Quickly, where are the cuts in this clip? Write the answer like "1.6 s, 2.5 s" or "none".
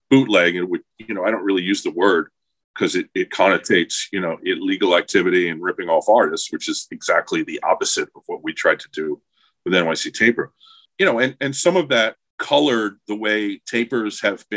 10.8 s, 12.3 s